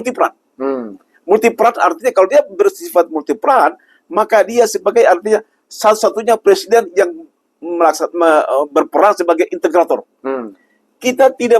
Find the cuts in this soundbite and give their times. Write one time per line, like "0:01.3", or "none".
none